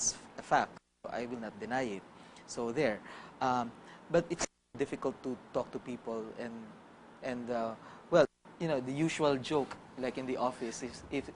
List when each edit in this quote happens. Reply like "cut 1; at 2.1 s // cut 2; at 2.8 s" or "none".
cut 1; at 3.5 s